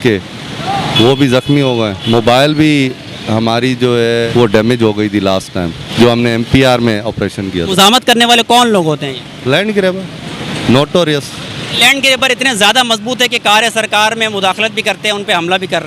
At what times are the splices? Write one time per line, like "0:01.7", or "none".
0:02.0
0:04.3
0:05.8
0:07.7
0:11.8